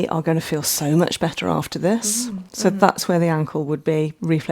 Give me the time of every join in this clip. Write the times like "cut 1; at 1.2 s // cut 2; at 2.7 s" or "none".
cut 1; at 2.5 s